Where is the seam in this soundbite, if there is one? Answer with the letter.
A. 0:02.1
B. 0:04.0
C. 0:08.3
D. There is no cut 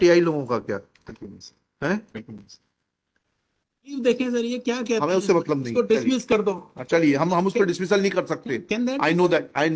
B